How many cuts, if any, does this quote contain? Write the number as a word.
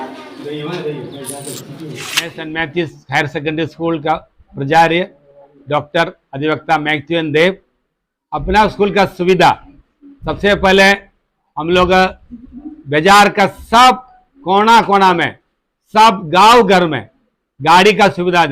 one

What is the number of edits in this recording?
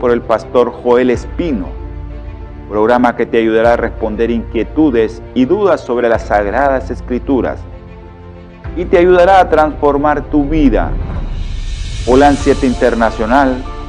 zero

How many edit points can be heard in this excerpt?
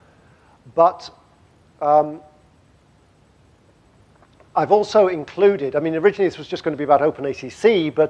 one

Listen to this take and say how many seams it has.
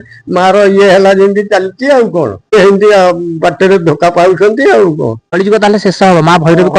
two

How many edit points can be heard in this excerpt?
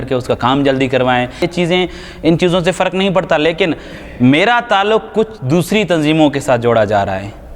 one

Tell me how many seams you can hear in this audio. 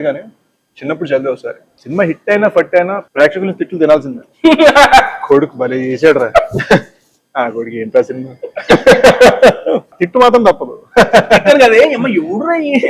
three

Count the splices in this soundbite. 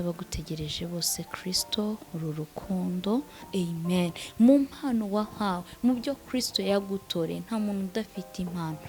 one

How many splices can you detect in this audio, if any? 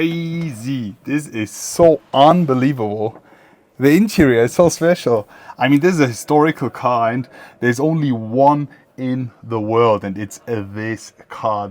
zero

